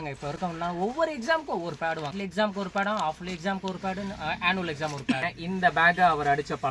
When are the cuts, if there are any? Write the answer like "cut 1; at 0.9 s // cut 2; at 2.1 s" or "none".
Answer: cut 1; at 1.8 s // cut 2; at 5.3 s